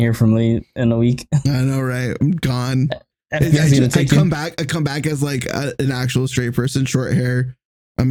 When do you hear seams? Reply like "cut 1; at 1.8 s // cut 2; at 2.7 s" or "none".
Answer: none